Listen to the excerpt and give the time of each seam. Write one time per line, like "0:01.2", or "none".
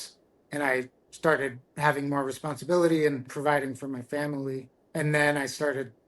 0:03.3
0:04.8